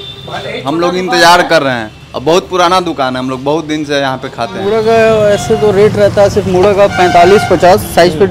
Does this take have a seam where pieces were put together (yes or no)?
yes